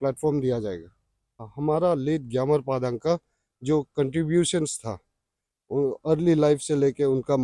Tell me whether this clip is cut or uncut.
cut